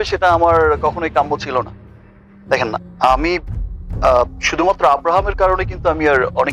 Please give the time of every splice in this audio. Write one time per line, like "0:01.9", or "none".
none